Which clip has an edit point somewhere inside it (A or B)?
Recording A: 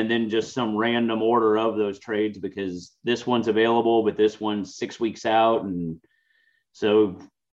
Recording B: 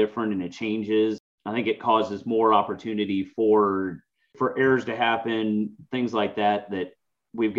B